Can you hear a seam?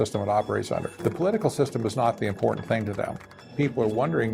yes; 2 cuts; at 0.9 s, 3.4 s

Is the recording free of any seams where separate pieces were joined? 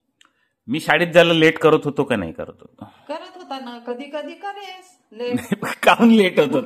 yes; 0 cuts

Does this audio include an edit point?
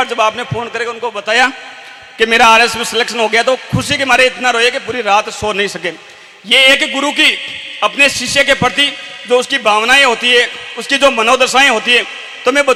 no; 0 cuts

